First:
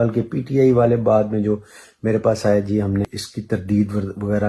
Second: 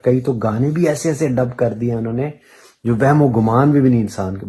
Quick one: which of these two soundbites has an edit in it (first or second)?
first